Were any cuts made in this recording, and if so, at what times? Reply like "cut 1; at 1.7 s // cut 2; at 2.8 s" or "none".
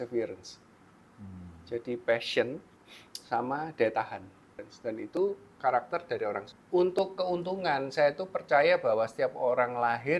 cut 1; at 4.7 s // cut 2; at 6.5 s